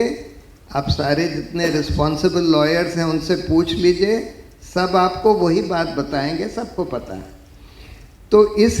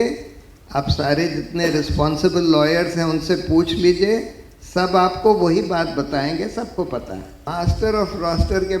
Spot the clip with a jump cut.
second; 1 cut; at 7.4 s

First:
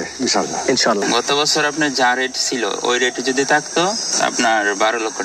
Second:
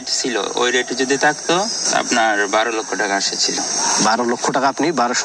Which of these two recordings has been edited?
first; 1 cut; at 1.0 s

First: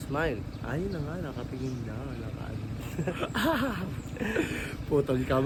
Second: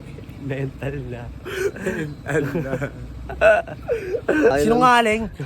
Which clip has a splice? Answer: second; 1 cut; at 4.5 s

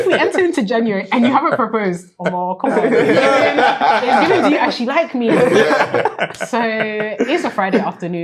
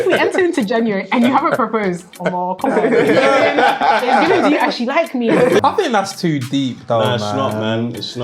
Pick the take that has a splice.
second; 1 cut; at 5.6 s

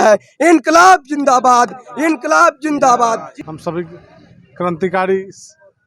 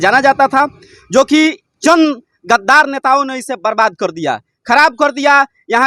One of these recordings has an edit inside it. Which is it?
first; 1 cut; at 3.4 s

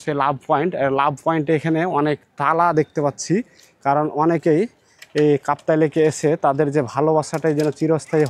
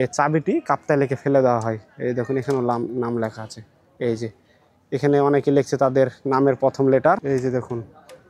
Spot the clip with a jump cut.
second; 1 cut; at 7.2 s

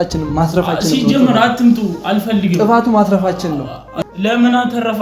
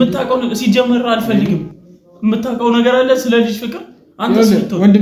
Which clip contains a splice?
first; 1 cut; at 3.9 s

